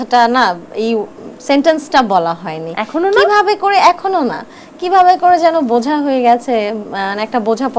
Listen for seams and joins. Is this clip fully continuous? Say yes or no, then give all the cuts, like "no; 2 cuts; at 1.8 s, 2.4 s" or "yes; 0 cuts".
yes; 0 cuts